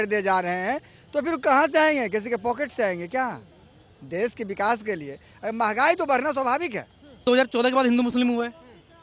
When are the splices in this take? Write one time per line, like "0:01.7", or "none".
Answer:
0:07.2